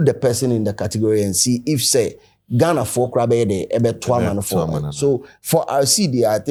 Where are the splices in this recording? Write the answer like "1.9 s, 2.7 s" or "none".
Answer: none